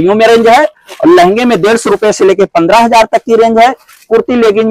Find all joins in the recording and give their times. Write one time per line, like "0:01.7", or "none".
none